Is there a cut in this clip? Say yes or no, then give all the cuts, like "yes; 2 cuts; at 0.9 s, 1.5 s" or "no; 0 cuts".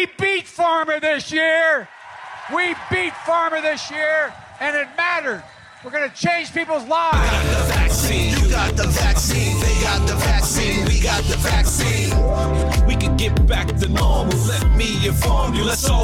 yes; 1 cut; at 7.2 s